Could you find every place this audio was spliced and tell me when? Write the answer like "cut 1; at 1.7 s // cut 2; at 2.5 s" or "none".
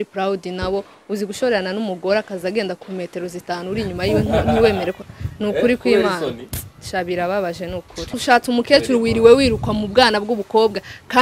cut 1; at 8.1 s